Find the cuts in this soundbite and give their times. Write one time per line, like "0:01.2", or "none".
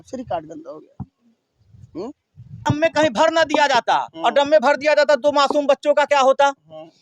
0:02.7

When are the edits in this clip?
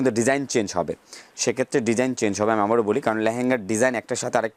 none

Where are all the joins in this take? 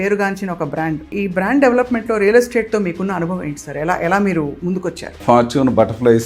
0:01.1
0:05.1

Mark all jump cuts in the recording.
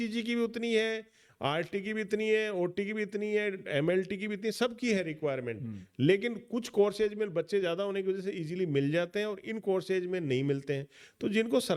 none

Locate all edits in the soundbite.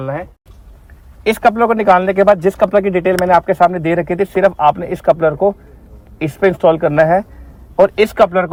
none

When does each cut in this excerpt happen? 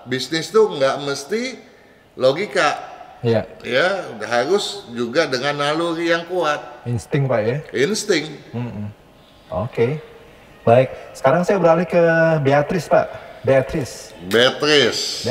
none

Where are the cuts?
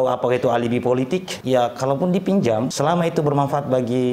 0:01.3
0:02.7

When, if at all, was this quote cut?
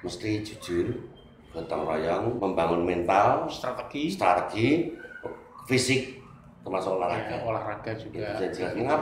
0:02.4

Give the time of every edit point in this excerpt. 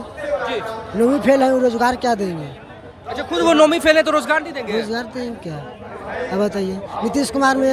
none

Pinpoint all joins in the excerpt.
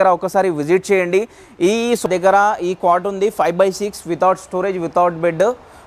0:02.1

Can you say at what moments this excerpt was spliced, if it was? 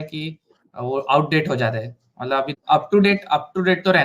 0:02.5

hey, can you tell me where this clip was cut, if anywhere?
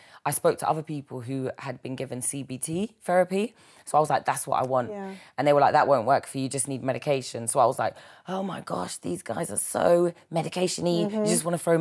none

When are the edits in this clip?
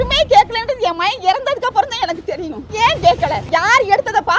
0:02.6
0:03.4

